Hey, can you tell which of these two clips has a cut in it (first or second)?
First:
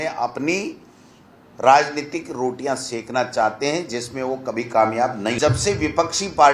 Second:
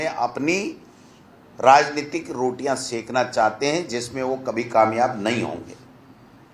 first